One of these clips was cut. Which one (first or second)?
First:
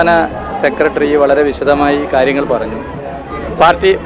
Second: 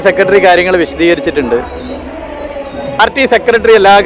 second